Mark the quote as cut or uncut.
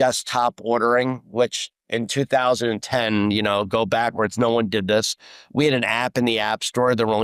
uncut